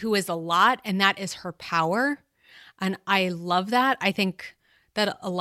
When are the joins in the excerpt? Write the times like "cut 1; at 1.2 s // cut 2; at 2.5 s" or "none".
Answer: none